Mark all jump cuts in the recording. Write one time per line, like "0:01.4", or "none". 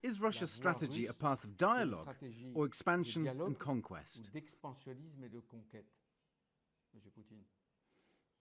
none